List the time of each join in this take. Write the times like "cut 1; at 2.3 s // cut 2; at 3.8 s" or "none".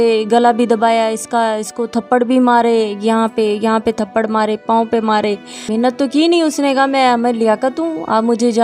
cut 1; at 5.6 s